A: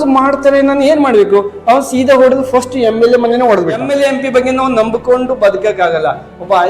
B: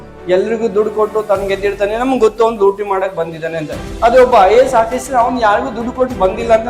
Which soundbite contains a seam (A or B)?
A